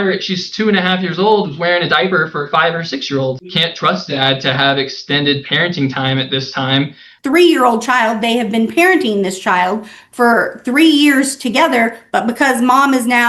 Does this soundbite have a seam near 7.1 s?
yes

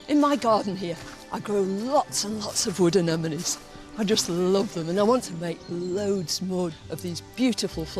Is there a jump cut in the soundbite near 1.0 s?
no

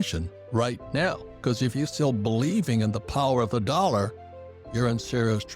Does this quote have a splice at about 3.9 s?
no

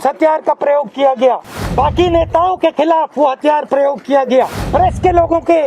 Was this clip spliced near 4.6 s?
yes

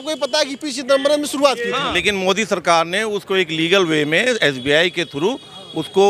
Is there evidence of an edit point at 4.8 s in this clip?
no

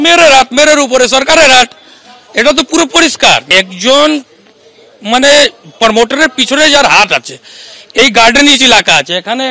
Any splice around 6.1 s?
no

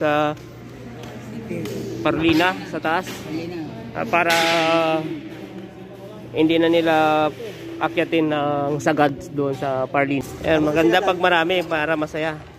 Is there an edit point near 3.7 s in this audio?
no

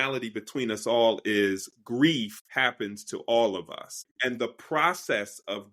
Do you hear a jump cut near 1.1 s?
no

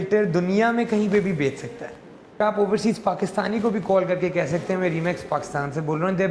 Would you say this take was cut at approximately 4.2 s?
no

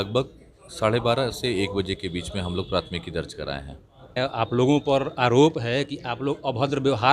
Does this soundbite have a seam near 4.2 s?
yes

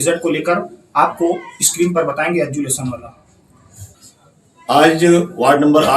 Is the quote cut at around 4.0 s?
yes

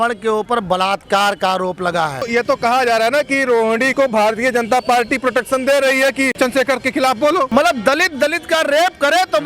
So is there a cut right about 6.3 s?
yes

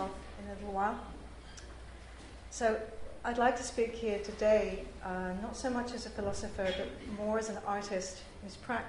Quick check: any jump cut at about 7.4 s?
no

